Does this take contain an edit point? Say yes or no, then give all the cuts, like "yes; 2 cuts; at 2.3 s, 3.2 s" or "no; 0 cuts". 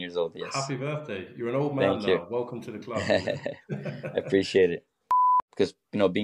yes; 1 cut; at 5.1 s